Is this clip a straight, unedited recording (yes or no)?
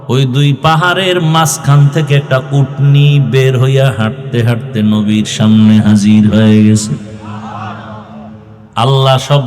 no